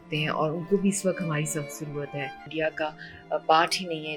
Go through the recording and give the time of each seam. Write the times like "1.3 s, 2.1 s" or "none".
2.5 s